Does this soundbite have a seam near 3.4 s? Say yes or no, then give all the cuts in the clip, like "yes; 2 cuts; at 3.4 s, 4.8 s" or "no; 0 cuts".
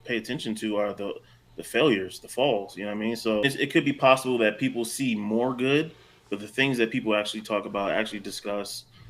yes; 1 cut; at 3.4 s